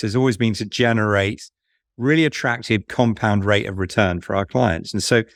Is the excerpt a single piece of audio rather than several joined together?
yes; 0 cuts

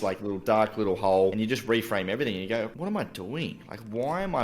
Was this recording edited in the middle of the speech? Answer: yes; 2 cuts; at 1.3 s, 2.7 s

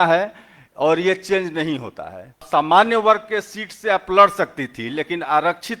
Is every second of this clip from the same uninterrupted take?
no; 1 cut; at 2.4 s

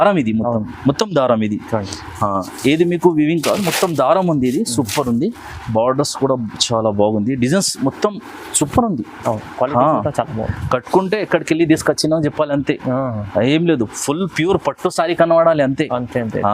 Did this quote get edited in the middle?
no; 0 cuts

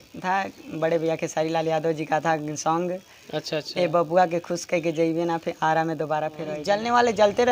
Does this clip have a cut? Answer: yes; 1 cut; at 6.5 s

